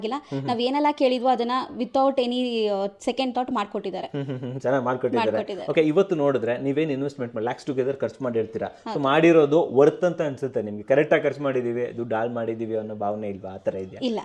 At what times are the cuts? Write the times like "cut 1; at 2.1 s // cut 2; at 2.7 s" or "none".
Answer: none